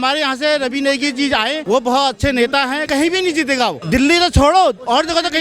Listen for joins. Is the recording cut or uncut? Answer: cut